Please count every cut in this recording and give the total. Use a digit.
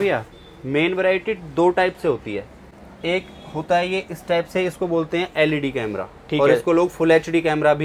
0